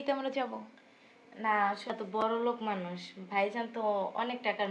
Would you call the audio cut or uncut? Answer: cut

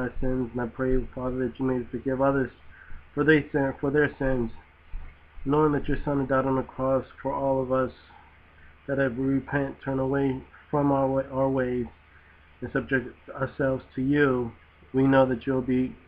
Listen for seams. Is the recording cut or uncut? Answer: cut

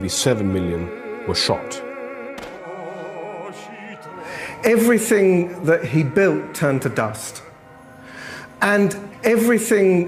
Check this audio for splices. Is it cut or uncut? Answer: uncut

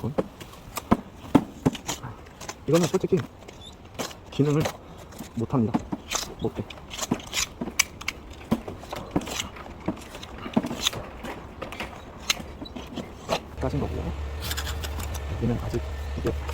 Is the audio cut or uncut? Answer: cut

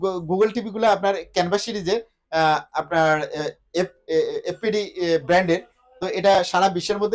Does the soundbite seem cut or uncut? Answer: uncut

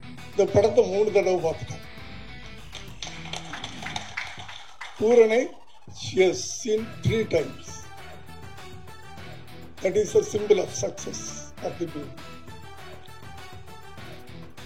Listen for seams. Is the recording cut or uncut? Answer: uncut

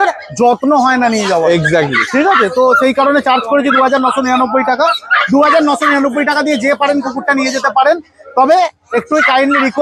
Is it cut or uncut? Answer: uncut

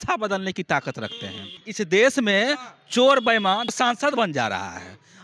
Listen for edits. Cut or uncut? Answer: cut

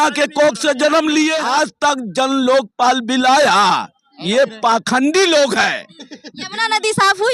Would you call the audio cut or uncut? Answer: cut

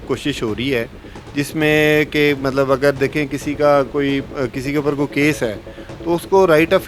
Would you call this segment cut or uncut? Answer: uncut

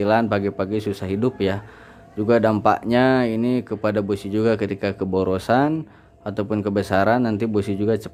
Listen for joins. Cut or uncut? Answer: uncut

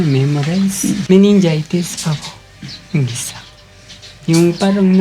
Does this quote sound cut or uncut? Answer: cut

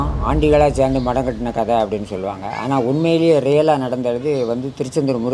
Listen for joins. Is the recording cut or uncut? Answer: uncut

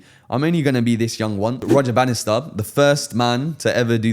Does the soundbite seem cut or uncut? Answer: cut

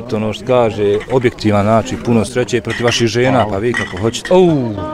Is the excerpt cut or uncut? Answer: uncut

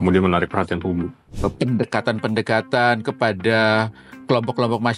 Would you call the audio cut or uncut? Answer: cut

